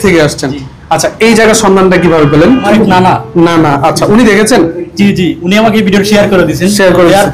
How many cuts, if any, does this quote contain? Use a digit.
1